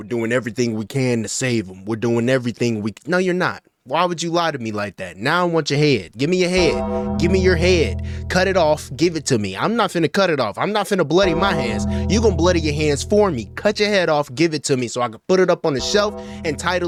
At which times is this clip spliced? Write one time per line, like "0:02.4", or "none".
none